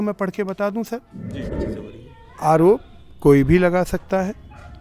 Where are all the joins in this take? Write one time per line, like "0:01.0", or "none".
0:01.5